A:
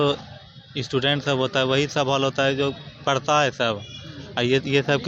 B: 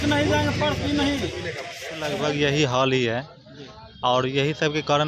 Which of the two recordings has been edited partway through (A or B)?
B